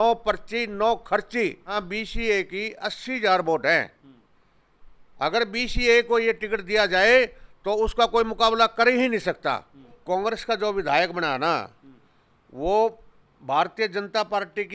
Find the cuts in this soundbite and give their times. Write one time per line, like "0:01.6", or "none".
0:01.8
0:10.0